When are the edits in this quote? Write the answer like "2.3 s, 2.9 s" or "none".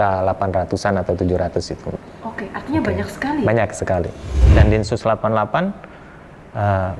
4.3 s